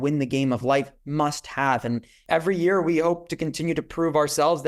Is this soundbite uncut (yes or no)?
no